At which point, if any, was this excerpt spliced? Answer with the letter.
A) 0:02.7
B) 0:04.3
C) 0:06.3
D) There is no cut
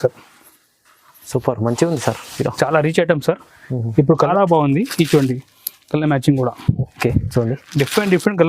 B